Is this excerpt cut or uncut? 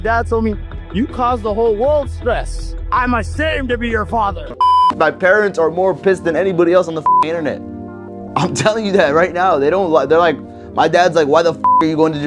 cut